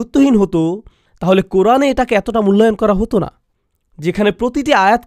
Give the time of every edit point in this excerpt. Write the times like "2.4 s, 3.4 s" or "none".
none